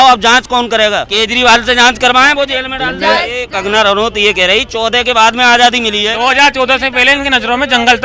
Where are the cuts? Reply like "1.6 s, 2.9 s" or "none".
1.1 s, 3.5 s, 6.1 s